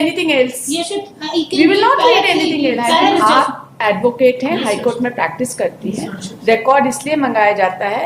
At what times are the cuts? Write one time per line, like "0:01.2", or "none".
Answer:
0:03.2